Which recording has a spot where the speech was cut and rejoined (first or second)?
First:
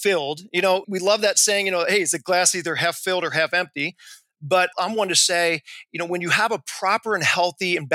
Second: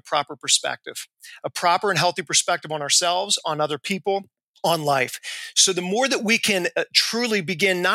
first